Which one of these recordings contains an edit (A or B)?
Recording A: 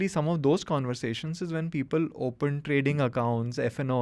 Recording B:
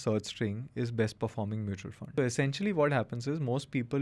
B